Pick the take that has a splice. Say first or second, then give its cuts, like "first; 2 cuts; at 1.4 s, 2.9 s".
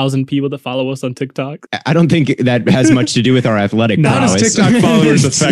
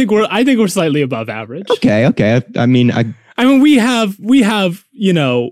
first; 1 cut; at 1.6 s